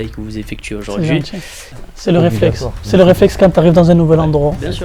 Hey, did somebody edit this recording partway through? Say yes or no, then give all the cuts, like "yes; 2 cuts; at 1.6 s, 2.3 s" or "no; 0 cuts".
yes; 1 cut; at 1.8 s